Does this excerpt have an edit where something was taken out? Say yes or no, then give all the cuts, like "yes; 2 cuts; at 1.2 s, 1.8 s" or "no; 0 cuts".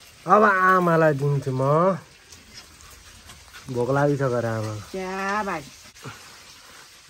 yes; 1 cut; at 5.9 s